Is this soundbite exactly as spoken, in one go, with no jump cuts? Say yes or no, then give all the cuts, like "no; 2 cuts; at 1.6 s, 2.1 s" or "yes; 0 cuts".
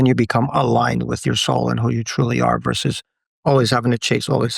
no; 1 cut; at 1.2 s